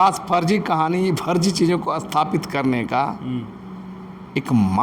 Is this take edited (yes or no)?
no